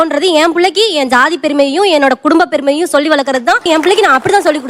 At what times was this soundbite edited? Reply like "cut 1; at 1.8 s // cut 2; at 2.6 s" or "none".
none